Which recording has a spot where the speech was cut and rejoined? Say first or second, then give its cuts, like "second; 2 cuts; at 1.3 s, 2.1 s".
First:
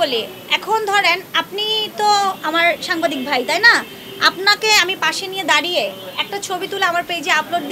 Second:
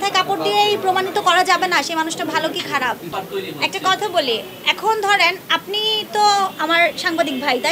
second; 1 cut; at 3.1 s